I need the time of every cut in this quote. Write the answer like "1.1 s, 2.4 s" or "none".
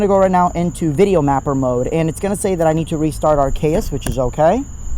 4.1 s